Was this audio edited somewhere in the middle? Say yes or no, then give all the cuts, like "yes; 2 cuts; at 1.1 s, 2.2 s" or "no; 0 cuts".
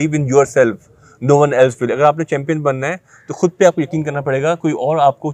no; 0 cuts